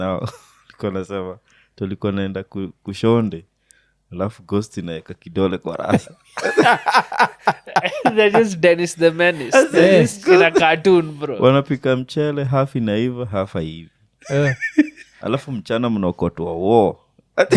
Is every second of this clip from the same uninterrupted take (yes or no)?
yes